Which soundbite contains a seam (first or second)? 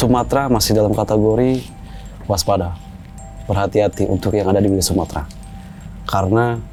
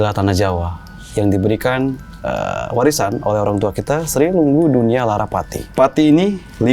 second